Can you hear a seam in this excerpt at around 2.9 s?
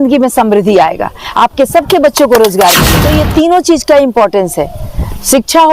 yes; 1 cut; at 2.9 s

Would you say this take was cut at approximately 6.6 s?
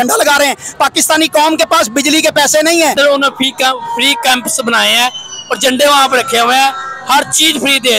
no; 1 cut; at 2.9 s

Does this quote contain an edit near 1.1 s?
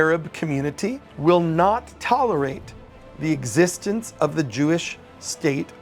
yes; 1 cut; at 1.1 s

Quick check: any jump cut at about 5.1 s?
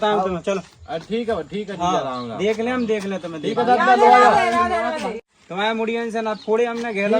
yes; 1 cut; at 5.1 s

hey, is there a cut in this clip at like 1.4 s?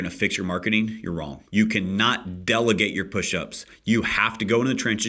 yes; 1 cut; at 1.4 s

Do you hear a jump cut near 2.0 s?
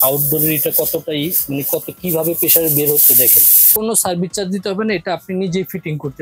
no; 1 cut; at 3.7 s

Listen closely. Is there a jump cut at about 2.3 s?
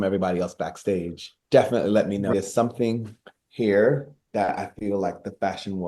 yes; 1 cut; at 2.3 s

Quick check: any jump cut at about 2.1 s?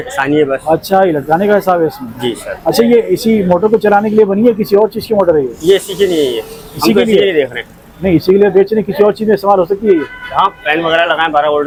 no; 0 cuts

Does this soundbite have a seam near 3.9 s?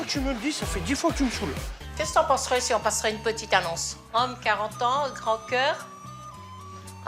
yes; 2 cuts; at 2.1 s, 3.9 s

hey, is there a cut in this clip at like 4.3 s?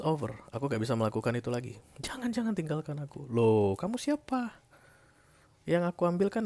no; 0 cuts

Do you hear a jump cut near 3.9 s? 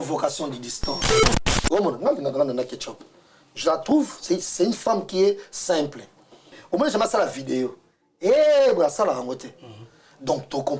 no; 2 cuts; at 1.2 s, 6.6 s

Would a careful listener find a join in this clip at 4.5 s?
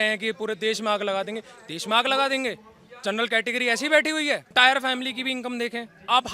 yes; 1 cut; at 4.5 s

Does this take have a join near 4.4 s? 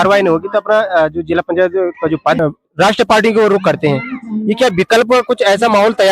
no; 1 cut; at 2.4 s

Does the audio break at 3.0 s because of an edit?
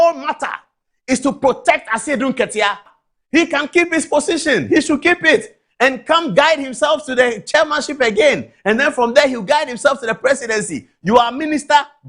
yes; 1 cut; at 3.0 s

